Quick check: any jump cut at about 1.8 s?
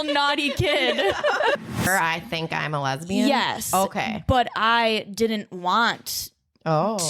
yes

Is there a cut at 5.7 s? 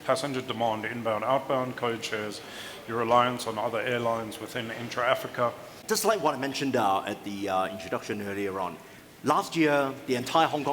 yes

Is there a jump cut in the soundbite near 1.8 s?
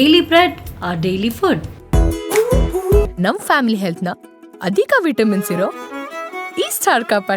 yes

